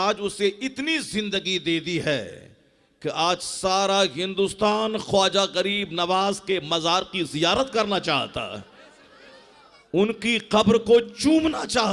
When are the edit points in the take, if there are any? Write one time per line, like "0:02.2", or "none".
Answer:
none